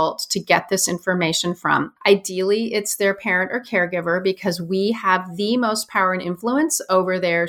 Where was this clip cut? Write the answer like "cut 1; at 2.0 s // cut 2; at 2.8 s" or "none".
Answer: cut 1; at 1.9 s